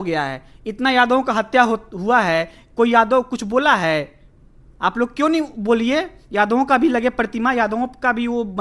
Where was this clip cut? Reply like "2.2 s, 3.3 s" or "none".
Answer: none

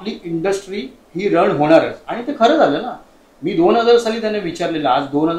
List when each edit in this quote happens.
none

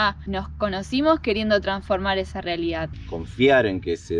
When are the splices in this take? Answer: 2.9 s

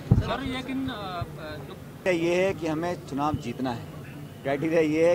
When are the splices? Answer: 2.1 s

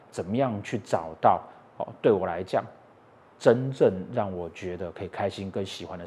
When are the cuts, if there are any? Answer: none

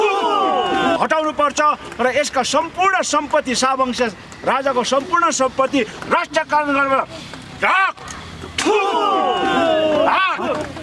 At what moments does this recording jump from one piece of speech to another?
1.0 s

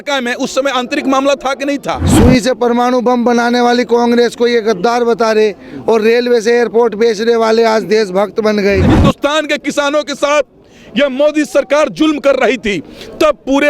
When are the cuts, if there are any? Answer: 2.1 s, 8.9 s

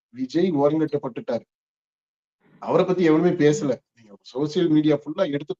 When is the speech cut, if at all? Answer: none

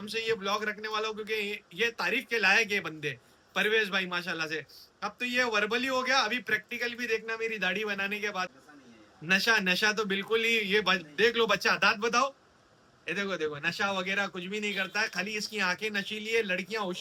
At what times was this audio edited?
none

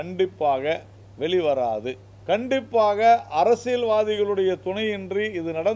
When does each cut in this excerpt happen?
2.1 s

